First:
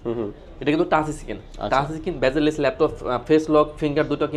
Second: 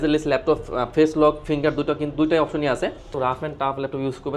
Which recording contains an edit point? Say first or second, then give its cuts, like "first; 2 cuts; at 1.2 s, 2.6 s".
second; 1 cut; at 3.1 s